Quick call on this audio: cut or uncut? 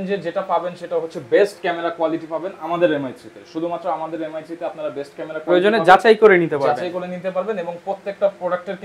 uncut